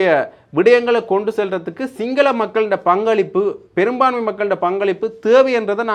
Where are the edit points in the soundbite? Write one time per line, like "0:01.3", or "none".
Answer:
none